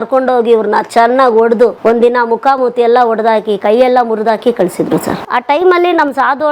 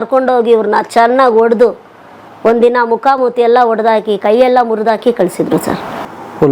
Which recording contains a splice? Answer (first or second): first